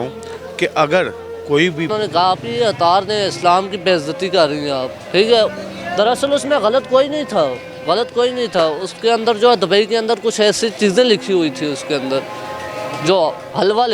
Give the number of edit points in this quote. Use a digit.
1